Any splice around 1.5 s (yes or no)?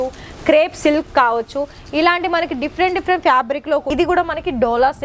no